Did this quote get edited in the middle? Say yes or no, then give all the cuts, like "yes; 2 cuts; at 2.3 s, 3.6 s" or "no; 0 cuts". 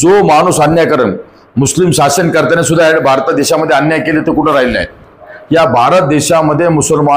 yes; 1 cut; at 5.3 s